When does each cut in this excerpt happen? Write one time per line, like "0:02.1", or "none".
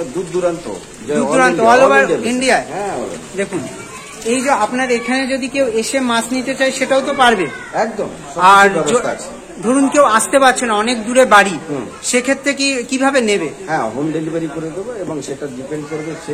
none